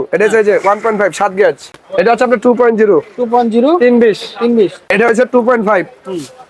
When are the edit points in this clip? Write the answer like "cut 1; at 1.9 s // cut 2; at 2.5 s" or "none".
cut 1; at 1.7 s // cut 2; at 4.8 s